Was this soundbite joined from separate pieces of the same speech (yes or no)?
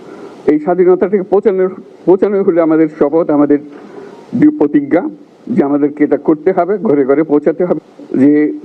no